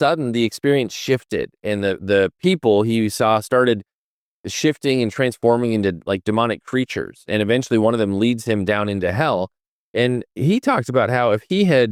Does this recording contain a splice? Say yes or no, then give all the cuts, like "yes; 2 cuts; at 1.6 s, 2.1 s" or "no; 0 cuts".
no; 0 cuts